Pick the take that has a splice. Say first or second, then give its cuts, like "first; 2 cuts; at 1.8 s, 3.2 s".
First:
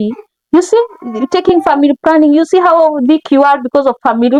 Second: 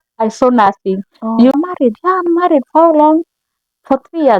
second; 1 cut; at 1.5 s